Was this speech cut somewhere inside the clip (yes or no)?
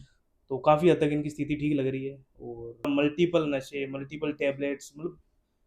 yes